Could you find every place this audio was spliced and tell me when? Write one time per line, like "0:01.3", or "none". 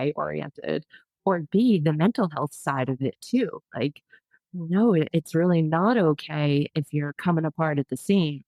none